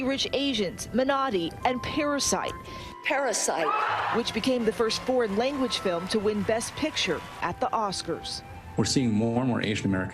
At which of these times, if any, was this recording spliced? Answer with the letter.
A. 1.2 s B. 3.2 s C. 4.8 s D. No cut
D